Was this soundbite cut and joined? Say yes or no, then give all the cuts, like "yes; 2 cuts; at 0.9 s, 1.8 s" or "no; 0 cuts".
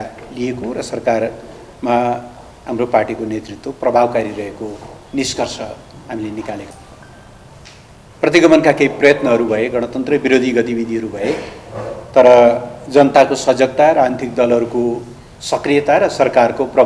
yes; 1 cut; at 6.7 s